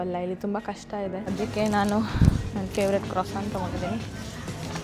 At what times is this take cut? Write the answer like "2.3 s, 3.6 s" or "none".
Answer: 1.2 s